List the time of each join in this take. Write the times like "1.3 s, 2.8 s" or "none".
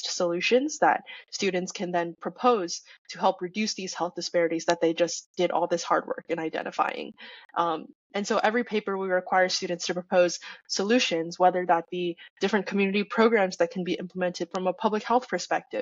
none